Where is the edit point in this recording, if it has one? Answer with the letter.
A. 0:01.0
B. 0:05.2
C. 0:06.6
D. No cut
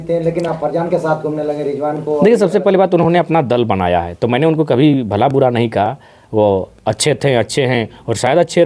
D